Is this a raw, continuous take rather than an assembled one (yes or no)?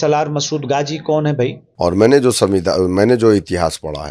no